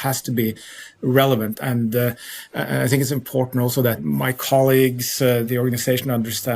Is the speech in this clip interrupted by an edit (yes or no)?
yes